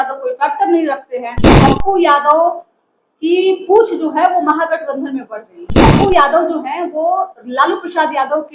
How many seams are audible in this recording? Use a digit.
2